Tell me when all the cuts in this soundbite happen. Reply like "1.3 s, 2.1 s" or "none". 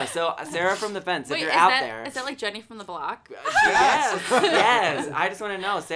none